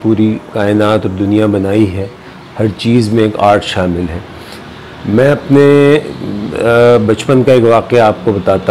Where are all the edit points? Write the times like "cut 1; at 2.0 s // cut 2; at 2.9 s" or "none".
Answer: none